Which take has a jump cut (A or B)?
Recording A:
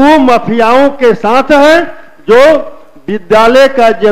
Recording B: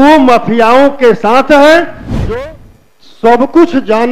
B